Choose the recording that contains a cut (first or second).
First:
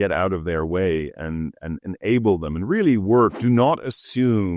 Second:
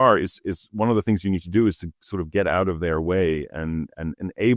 first